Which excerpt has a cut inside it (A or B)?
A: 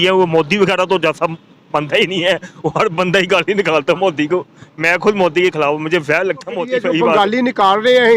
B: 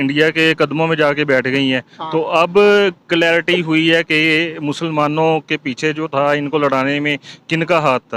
A